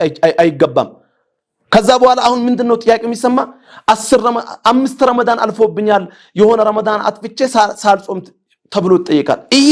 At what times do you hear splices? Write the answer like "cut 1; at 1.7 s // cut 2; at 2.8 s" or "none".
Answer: none